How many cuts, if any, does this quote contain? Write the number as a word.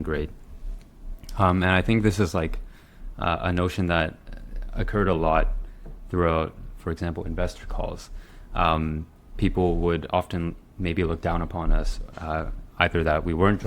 zero